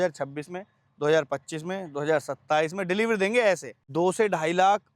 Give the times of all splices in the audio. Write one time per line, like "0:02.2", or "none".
0:03.8